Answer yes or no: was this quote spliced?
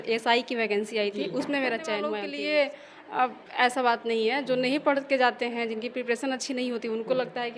yes